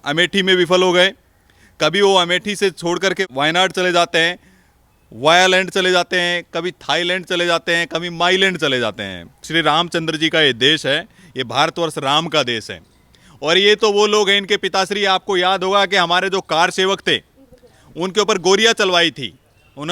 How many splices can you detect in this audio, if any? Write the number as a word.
one